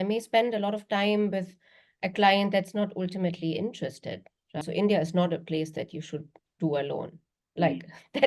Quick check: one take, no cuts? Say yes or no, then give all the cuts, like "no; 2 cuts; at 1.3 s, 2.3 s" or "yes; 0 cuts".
no; 1 cut; at 4.6 s